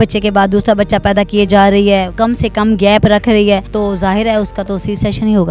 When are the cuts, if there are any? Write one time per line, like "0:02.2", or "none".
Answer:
0:02.1
0:03.7